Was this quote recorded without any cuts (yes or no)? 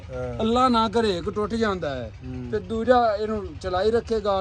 yes